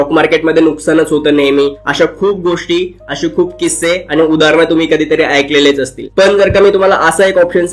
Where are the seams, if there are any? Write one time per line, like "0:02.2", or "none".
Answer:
none